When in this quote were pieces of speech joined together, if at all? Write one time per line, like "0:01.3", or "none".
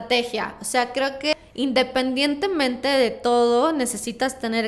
0:01.3